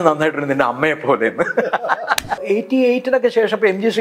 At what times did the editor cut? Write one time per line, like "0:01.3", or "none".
0:02.4

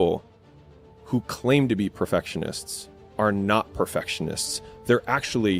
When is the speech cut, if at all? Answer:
none

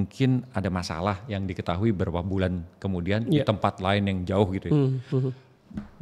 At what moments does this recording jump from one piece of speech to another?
none

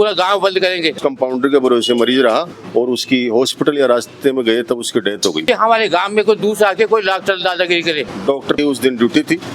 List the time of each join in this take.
0:01.0
0:02.5
0:05.4
0:08.1

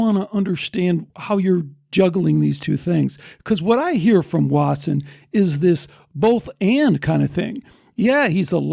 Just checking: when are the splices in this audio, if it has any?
0:01.1

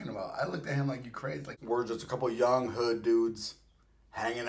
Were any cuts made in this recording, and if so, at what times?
0:01.5

